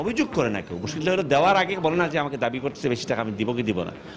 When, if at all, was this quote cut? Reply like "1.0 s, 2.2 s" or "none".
none